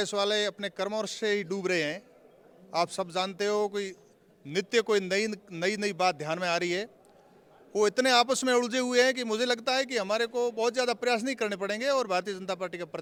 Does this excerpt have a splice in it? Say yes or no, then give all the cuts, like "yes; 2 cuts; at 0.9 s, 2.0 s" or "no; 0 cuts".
no; 0 cuts